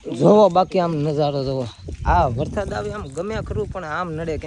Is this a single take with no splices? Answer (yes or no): yes